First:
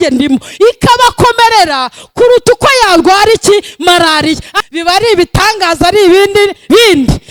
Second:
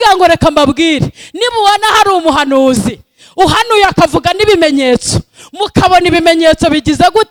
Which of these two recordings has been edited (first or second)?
first